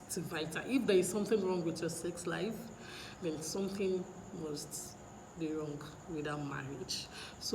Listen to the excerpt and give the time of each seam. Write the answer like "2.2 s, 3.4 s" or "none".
none